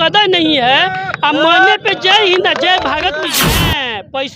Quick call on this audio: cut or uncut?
cut